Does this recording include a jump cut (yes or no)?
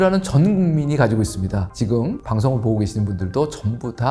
no